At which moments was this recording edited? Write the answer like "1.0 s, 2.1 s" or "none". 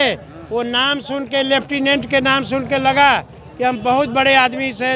none